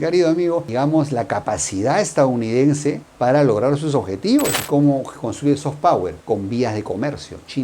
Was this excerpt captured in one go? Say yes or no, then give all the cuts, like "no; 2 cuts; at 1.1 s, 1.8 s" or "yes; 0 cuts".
no; 1 cut; at 4.6 s